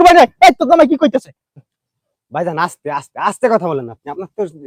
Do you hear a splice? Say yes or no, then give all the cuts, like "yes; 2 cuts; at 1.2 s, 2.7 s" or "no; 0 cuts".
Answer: no; 0 cuts